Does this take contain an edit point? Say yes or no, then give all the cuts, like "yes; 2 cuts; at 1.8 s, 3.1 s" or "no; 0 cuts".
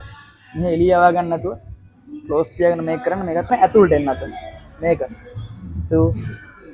yes; 1 cut; at 3.5 s